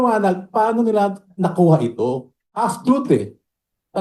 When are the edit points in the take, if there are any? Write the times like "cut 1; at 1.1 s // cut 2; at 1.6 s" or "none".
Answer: cut 1; at 2.6 s